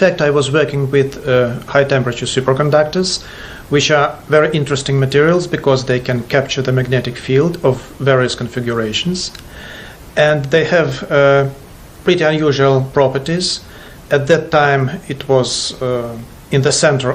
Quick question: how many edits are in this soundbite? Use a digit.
1